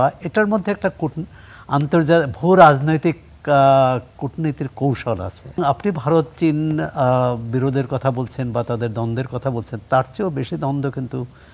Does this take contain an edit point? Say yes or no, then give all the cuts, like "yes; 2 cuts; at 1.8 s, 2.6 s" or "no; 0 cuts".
yes; 1 cut; at 5.6 s